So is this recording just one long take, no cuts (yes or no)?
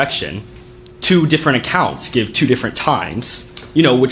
yes